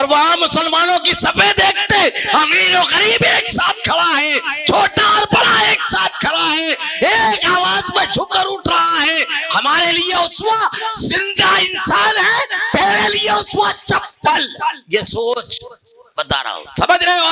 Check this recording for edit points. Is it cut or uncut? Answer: uncut